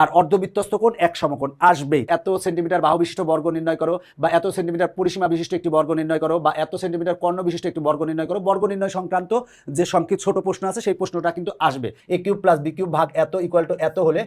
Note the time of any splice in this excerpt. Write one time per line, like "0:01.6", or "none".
0:02.1
0:12.0